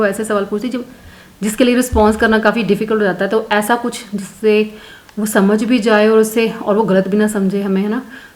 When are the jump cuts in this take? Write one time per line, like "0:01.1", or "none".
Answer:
none